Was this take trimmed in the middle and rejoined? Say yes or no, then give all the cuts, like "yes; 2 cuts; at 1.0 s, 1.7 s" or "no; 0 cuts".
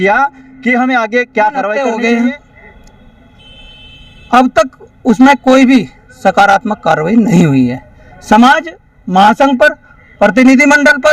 yes; 1 cut; at 1.7 s